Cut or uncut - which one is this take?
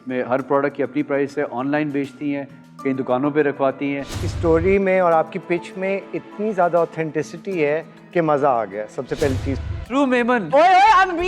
cut